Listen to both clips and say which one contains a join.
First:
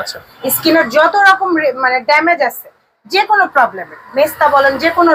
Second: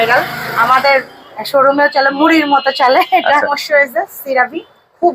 second; 1 cut; at 3.6 s

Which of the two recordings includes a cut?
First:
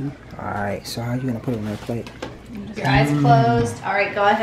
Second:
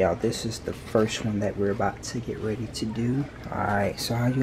first; 1 cut; at 2.8 s

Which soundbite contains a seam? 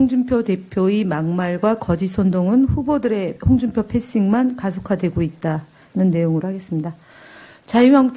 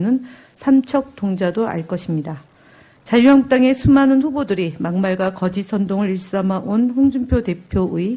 second; 1 cut; at 5.4 s

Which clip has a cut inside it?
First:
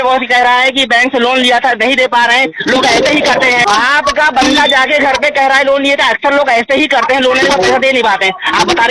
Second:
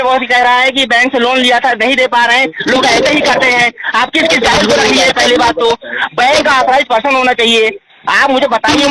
first; 1 cut; at 3.6 s

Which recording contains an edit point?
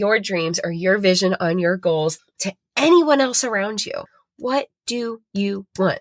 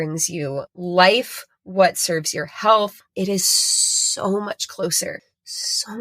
second; 1 cut; at 3.1 s

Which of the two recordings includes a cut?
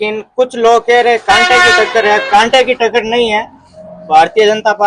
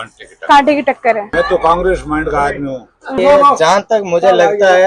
second; 2 cuts; at 1.3 s, 3.2 s

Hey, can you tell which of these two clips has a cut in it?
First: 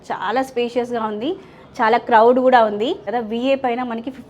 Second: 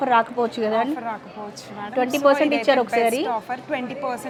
first; 1 cut; at 3.1 s

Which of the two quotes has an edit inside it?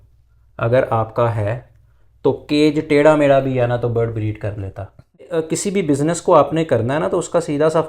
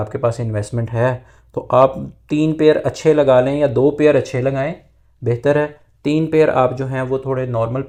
first; 1 cut; at 5.4 s

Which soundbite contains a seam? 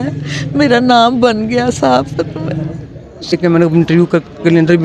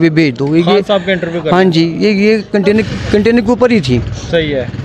first; 1 cut; at 3.3 s

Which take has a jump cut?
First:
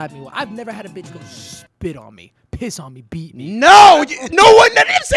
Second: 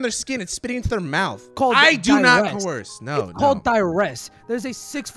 second; 1 cut; at 1.5 s

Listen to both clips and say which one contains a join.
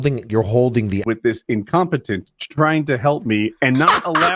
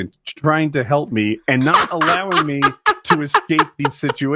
first; 1 cut; at 1.0 s

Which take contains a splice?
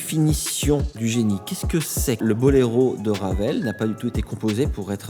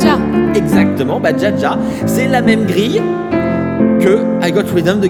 first; 2 cuts; at 0.9 s, 2.2 s

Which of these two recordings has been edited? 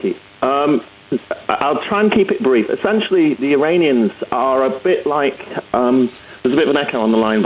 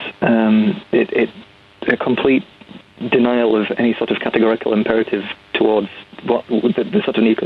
second; 1 cut; at 1.0 s

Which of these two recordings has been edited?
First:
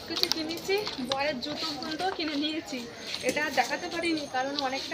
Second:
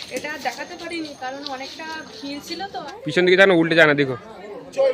second; 1 cut; at 2.9 s

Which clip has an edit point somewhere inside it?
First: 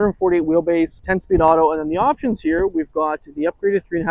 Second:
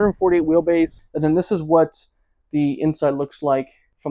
second; 1 cut; at 1.0 s

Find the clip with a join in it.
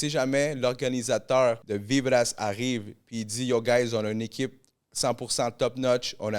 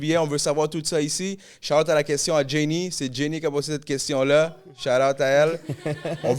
first; 1 cut; at 1.7 s

